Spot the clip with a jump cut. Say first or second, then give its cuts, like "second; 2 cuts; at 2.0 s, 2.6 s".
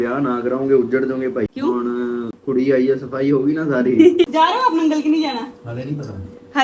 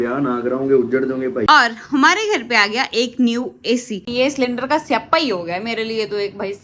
second; 2 cuts; at 1.5 s, 4.0 s